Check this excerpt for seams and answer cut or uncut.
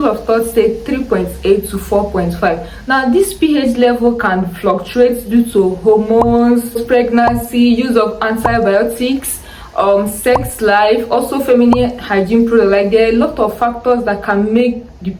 uncut